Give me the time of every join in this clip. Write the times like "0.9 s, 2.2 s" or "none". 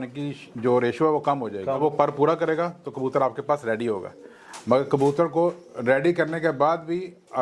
1.8 s